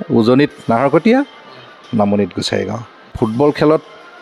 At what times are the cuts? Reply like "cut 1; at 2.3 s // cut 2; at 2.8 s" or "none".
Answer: cut 1; at 3.3 s